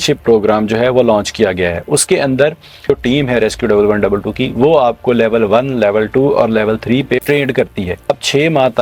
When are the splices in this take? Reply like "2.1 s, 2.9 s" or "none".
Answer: 2.9 s, 8.1 s

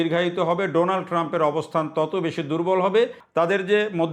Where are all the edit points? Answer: 3.2 s

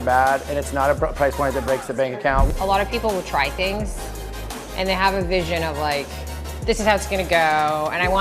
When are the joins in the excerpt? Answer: 2.5 s

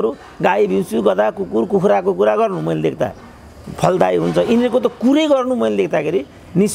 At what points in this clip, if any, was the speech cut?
none

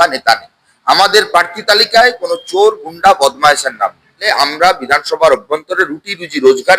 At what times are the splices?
4.3 s

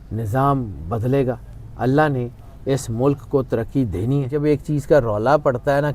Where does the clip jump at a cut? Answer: 4.3 s

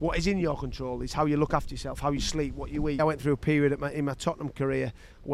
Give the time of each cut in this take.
3.0 s

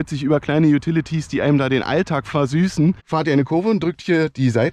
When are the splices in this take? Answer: 3.0 s

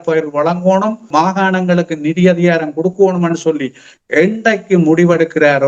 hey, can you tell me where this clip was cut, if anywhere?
1.1 s

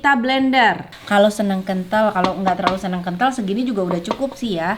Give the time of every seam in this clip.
0.9 s

